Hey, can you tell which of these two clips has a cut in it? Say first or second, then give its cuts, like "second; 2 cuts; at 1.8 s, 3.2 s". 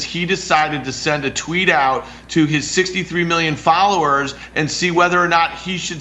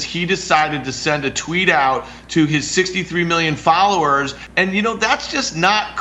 second; 1 cut; at 4.4 s